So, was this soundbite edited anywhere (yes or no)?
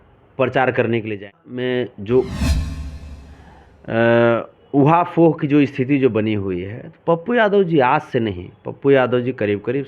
yes